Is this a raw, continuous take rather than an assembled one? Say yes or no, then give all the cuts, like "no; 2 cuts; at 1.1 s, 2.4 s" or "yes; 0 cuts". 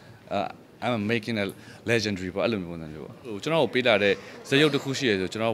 no; 1 cut; at 3.4 s